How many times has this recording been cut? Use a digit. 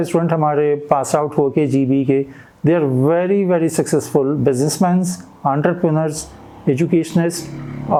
0